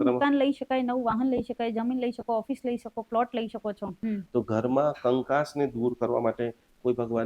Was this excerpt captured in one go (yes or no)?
no